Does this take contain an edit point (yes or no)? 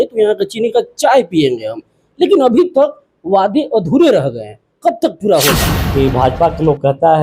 yes